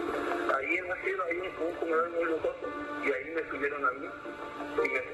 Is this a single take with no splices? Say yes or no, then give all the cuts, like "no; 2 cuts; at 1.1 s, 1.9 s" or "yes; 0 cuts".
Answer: yes; 0 cuts